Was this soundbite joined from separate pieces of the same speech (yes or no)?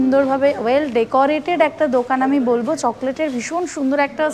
no